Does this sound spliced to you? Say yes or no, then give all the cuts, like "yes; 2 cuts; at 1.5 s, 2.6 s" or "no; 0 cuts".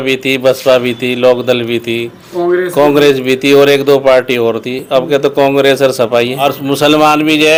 no; 0 cuts